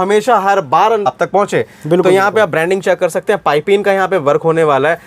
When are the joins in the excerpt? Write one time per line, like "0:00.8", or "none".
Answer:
0:01.1